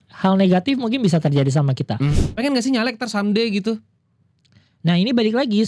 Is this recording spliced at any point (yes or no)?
yes